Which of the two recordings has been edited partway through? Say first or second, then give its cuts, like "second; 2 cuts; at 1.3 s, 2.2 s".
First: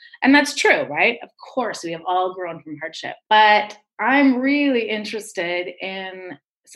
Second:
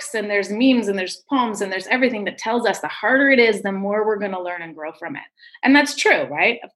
first; 1 cut; at 3.2 s